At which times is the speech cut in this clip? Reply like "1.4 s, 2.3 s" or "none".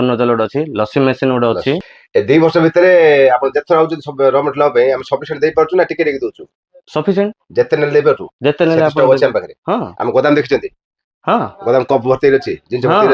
1.9 s